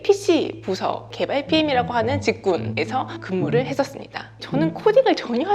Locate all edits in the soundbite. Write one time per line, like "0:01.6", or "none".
0:03.2
0:04.4